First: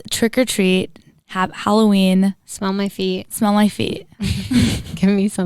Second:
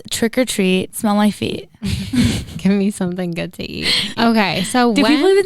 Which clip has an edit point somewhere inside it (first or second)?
second